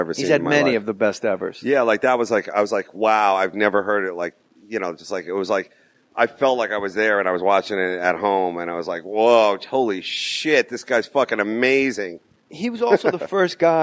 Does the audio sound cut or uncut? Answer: uncut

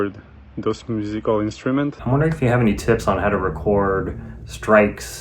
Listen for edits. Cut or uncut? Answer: cut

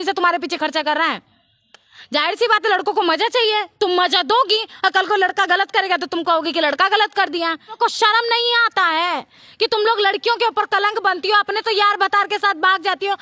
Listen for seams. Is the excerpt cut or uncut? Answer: cut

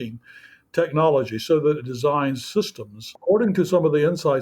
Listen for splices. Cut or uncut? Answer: cut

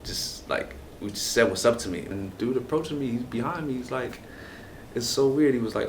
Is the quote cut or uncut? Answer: cut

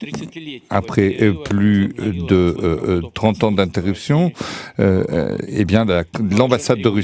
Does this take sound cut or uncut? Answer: uncut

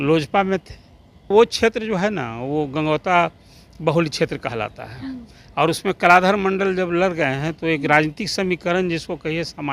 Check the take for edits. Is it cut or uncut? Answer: cut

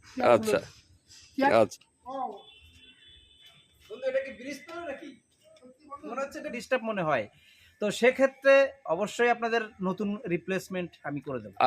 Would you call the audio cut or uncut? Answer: cut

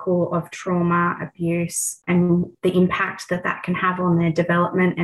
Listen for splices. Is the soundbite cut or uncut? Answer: uncut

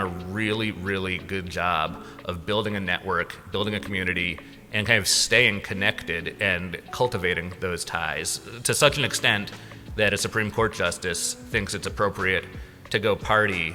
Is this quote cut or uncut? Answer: uncut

